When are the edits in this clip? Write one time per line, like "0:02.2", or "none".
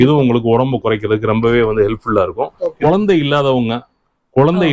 0:02.6